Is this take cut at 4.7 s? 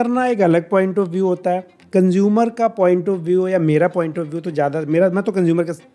no; 0 cuts

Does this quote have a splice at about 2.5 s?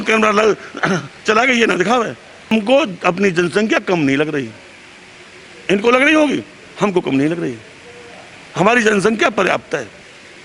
yes; 1 cut; at 2.5 s

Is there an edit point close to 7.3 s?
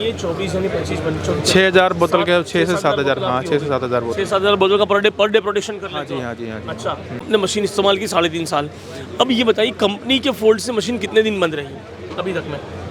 yes; 1 cut; at 7.3 s

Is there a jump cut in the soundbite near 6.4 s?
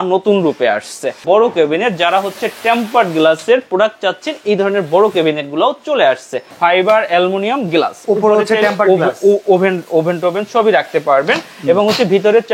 yes; 2 cuts; at 1.2 s, 6.4 s

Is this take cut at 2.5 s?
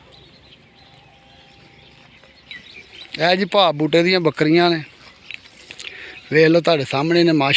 yes; 1 cut; at 2.5 s

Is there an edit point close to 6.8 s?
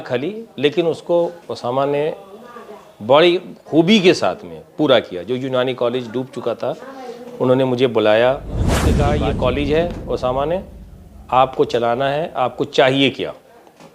no; 1 cut; at 9.0 s

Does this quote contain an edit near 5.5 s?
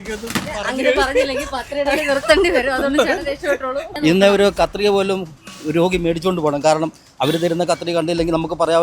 no; 1 cut; at 3.9 s

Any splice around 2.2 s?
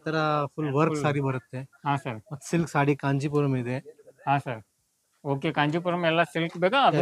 no; 0 cuts

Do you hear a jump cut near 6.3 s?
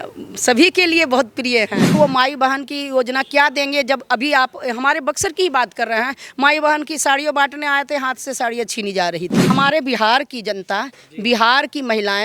no; 2 cuts; at 1.9 s, 9.5 s

